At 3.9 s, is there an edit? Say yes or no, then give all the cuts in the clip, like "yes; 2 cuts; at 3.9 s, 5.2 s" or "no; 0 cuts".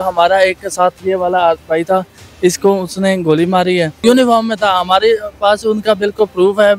yes; 1 cut; at 3.9 s